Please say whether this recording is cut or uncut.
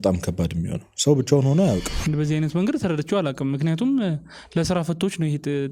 cut